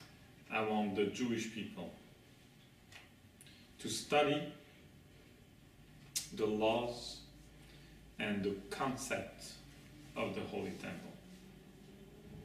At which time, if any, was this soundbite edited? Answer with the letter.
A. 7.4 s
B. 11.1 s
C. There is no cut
C